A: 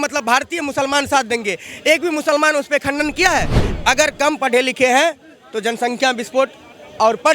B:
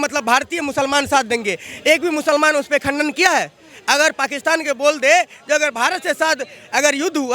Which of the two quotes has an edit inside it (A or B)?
A